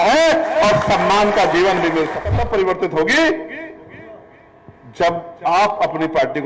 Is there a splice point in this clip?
yes; 1 cut; at 2.2 s

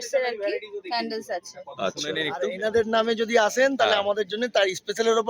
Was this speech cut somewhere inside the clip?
yes; 1 cut; at 2.2 s

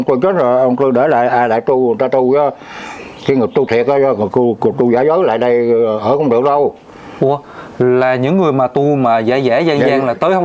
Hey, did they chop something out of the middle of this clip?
no; 0 cuts

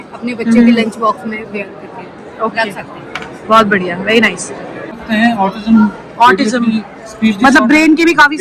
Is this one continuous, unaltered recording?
no; 1 cut; at 4.9 s

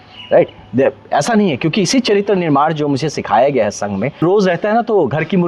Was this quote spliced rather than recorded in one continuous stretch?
yes; 1 cut; at 4.2 s

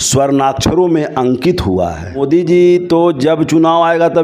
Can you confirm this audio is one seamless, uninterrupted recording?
no; 1 cut; at 2.2 s

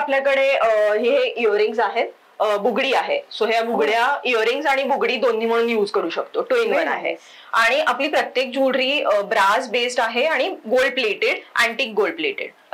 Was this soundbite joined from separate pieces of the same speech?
no; 0 cuts

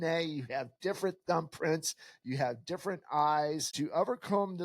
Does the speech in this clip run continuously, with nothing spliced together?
no; 1 cut; at 3.7 s

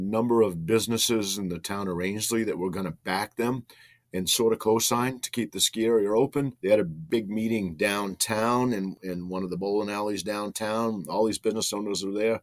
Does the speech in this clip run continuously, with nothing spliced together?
no; 2 cuts; at 6.9 s, 9.0 s

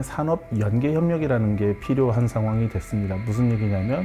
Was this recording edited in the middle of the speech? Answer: no; 0 cuts

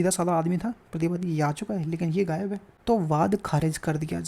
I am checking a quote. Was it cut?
yes; 1 cut; at 2.7 s

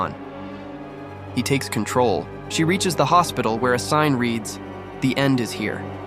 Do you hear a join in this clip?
yes; 1 cut; at 2.4 s

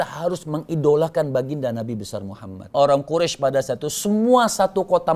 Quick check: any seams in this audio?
yes; 1 cut; at 2.7 s

